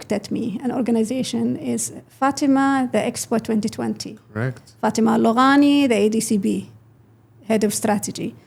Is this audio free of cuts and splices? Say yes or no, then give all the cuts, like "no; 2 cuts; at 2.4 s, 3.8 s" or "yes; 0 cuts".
yes; 0 cuts